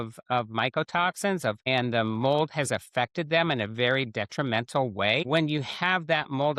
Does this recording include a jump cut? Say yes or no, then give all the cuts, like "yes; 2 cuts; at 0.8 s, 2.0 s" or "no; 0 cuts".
yes; 2 cuts; at 1.6 s, 5.2 s